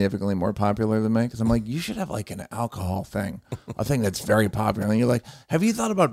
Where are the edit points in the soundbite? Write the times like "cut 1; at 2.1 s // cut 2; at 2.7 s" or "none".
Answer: none